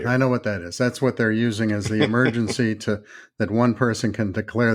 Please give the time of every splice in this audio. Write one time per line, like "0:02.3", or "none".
none